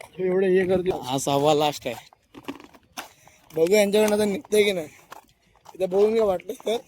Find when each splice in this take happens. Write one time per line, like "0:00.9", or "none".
0:00.9